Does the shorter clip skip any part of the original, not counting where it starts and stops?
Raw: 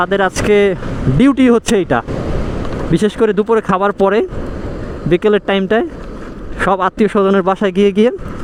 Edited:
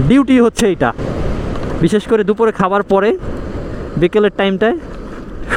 no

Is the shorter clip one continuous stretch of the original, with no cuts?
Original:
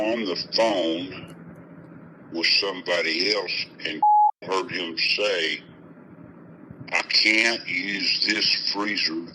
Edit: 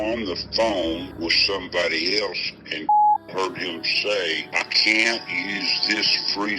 no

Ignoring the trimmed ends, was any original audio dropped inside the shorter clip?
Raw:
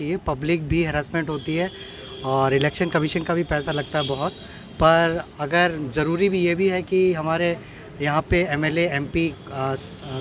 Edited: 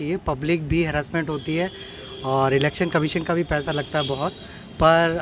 no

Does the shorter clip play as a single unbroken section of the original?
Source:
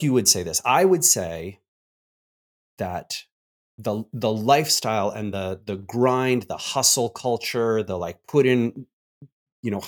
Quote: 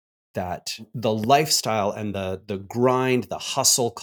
no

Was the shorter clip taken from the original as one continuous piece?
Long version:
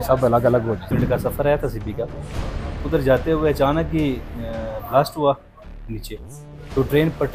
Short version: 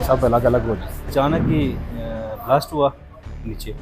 no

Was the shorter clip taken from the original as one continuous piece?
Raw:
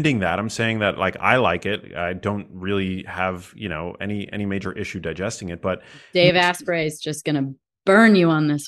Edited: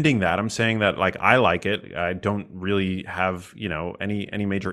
yes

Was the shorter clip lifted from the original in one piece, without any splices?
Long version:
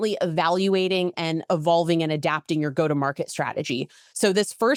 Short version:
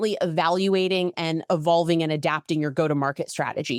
yes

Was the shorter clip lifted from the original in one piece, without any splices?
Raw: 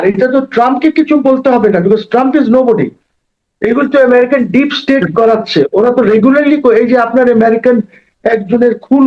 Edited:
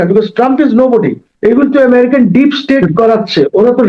no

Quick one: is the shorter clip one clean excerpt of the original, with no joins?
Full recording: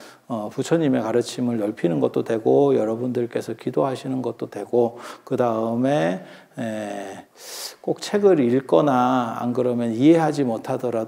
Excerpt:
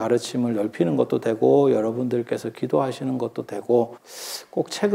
no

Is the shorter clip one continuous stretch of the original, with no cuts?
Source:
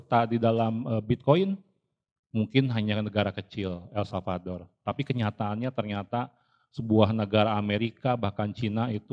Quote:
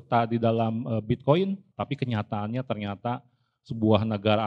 no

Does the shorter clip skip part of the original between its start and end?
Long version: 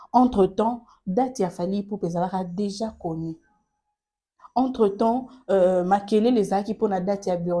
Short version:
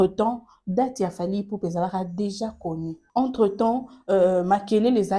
yes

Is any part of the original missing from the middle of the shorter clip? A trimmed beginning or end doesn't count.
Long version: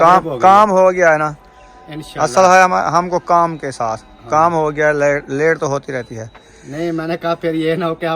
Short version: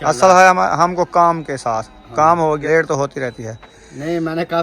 yes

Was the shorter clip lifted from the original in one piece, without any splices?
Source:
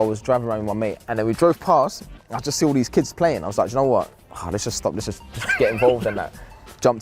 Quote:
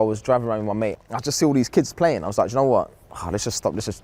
no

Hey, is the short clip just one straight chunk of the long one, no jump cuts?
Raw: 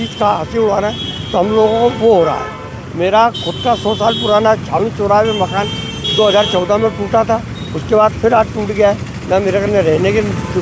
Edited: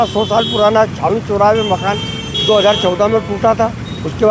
yes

